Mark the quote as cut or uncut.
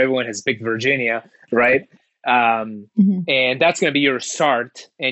uncut